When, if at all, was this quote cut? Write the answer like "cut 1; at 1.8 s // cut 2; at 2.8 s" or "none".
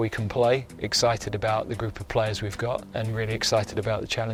none